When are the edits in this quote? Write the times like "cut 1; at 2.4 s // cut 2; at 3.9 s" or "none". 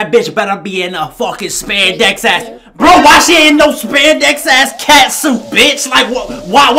none